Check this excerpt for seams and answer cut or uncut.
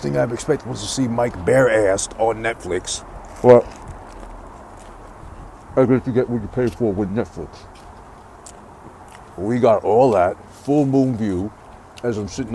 uncut